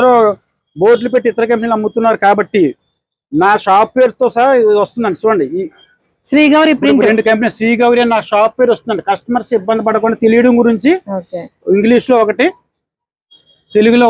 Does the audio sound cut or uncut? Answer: uncut